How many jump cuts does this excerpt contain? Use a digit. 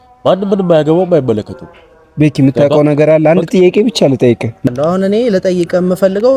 1